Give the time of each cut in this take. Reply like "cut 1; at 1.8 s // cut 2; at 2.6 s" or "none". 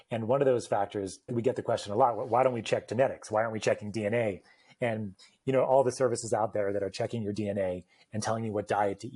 cut 1; at 1.3 s